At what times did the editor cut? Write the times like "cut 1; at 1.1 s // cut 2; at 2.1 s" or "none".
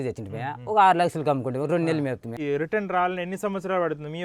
cut 1; at 2.4 s